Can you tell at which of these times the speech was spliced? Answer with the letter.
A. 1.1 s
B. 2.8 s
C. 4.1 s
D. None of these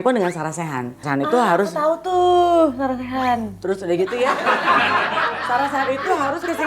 A